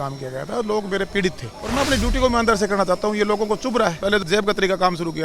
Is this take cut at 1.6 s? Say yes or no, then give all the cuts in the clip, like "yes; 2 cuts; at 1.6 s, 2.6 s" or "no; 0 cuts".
yes; 2 cuts; at 1.6 s, 4.2 s